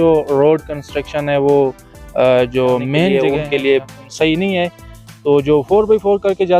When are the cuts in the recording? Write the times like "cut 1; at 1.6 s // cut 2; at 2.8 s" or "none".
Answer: cut 1; at 3.1 s